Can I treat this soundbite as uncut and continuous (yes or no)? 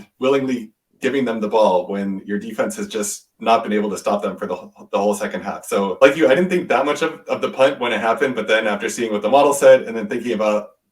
no